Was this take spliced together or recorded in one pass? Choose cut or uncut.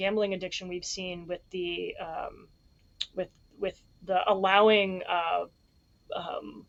uncut